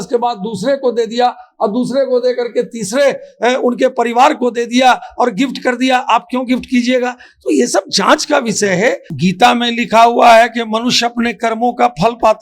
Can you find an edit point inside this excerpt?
yes; 1 cut; at 9.1 s

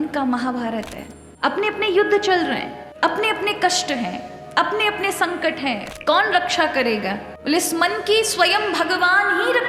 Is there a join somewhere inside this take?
yes; 2 cuts; at 1.3 s, 5.9 s

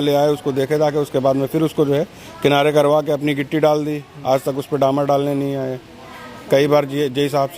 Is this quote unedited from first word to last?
yes; 0 cuts

